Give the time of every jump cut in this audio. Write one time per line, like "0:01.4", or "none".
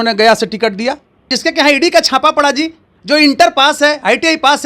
0:01.3